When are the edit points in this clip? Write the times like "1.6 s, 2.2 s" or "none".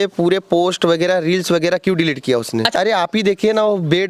2.7 s